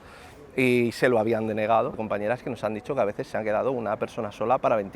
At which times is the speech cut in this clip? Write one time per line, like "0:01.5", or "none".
0:01.9

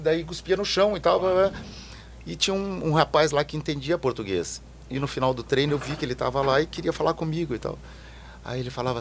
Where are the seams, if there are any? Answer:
none

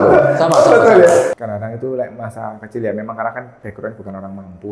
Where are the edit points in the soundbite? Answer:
0:01.3

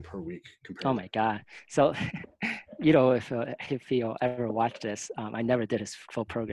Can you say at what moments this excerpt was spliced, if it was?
none

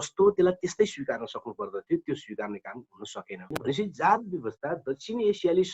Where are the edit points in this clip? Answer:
0:03.5

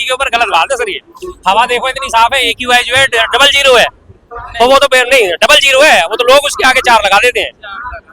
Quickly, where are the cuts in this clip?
none

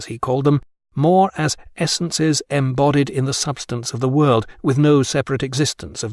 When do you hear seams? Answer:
none

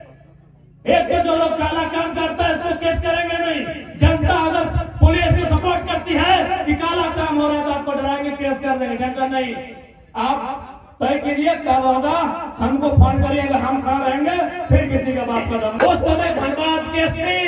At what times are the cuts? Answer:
0:15.7

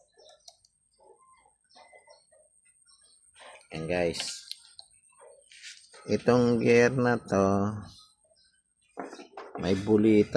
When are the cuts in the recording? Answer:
none

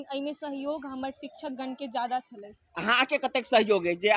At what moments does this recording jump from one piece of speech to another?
none

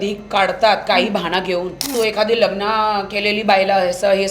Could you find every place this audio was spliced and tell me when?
0:01.9

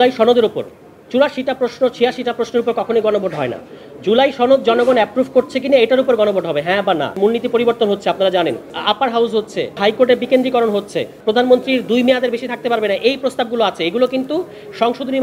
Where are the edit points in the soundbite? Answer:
0:07.1
0:08.7
0:09.8

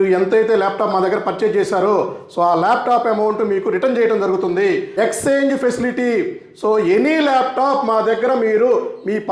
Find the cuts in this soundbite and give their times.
0:04.9

